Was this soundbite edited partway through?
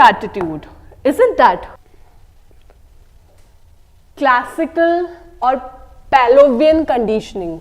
yes; 1 cut; at 1.8 s

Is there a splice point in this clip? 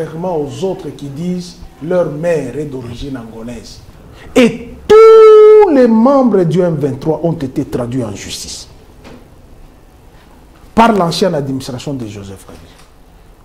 yes; 1 cut; at 3.8 s

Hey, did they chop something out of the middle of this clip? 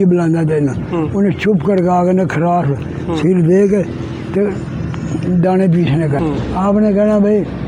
yes; 1 cut; at 6.2 s

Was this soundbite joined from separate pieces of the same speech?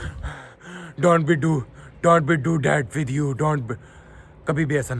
no; 0 cuts

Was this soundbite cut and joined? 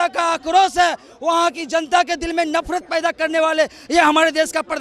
no; 0 cuts

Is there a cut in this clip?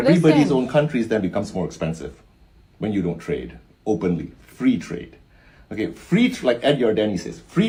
no; 0 cuts

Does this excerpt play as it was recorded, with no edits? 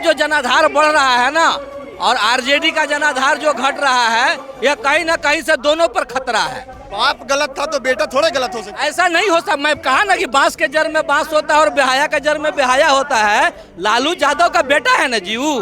no; 1 cut; at 6.8 s

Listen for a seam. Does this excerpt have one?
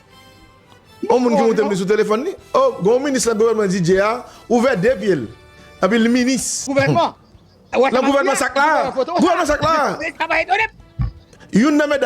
yes; 2 cuts; at 5.6 s, 6.7 s

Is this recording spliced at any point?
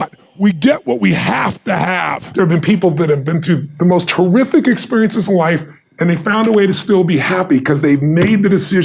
yes; 1 cut; at 2.2 s

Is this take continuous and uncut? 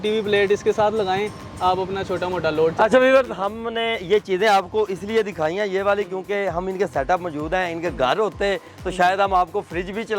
yes; 0 cuts

